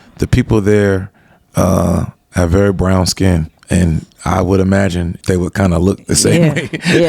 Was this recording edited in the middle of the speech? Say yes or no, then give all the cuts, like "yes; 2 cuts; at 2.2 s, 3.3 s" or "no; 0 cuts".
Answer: yes; 2 cuts; at 3.5 s, 5.1 s